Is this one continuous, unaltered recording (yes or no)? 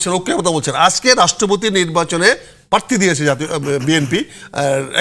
yes